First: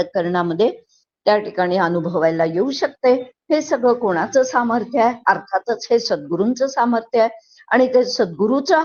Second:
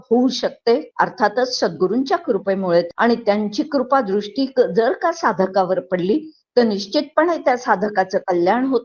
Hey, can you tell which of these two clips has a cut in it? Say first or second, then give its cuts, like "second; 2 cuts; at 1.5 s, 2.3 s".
second; 2 cuts; at 0.9 s, 2.9 s